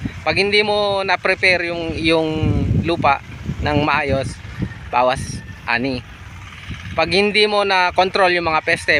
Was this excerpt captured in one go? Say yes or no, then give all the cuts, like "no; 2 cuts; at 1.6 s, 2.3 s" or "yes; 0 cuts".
yes; 0 cuts